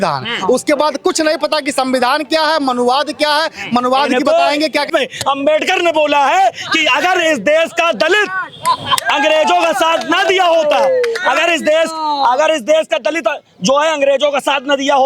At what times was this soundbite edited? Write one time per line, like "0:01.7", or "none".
0:04.9